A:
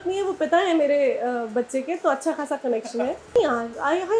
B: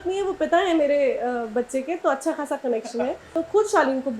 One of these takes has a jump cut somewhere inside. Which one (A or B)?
B